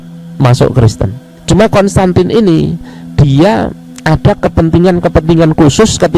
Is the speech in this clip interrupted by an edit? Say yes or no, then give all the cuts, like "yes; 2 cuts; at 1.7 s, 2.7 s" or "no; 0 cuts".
yes; 2 cuts; at 1.3 s, 3.9 s